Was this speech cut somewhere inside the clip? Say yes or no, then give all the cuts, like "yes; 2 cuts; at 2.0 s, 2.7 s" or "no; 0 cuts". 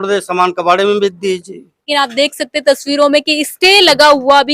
yes; 1 cut; at 1.9 s